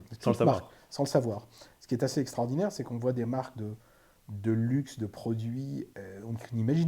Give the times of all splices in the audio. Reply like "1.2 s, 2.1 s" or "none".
5.9 s